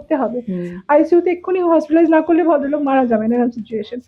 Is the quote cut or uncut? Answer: uncut